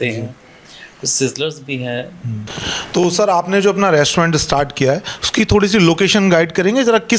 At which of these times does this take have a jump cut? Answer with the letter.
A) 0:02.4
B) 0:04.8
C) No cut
A